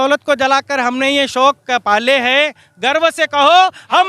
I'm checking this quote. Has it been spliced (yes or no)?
no